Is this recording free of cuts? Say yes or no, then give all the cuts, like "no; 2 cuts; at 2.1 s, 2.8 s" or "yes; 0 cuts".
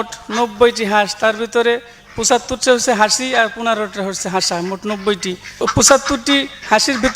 no; 1 cut; at 5.6 s